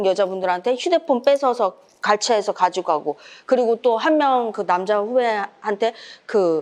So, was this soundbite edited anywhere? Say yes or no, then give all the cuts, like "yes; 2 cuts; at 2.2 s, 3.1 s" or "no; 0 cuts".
no; 0 cuts